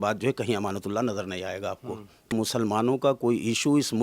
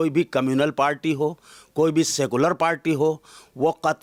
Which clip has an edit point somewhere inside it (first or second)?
first